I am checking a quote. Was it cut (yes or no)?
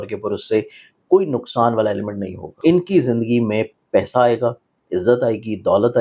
yes